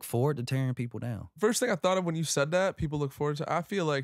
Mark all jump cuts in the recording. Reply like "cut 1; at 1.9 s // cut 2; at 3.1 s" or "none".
cut 1; at 1.3 s